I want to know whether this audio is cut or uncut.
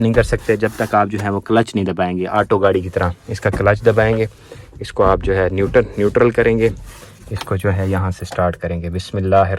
uncut